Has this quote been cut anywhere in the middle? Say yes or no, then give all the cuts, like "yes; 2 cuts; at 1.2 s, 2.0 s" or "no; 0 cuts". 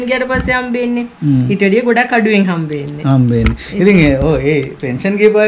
no; 0 cuts